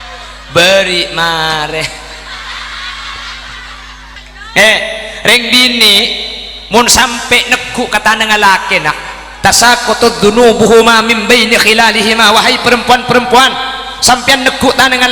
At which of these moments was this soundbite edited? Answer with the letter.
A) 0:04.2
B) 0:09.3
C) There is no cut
A